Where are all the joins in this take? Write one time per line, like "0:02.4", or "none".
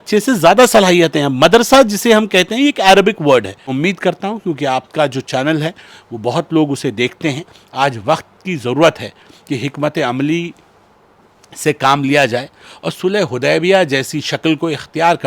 0:03.6

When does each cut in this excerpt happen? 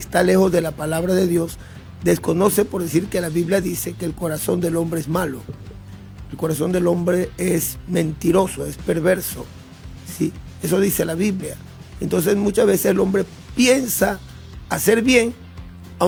none

